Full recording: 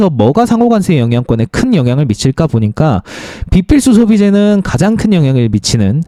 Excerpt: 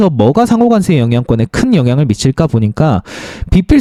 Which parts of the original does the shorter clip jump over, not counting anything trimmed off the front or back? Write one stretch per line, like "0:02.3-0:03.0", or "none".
none